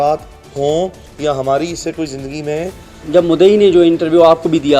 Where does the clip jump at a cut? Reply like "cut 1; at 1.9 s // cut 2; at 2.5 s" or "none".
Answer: cut 1; at 2.9 s